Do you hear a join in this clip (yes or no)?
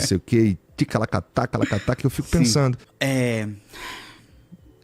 yes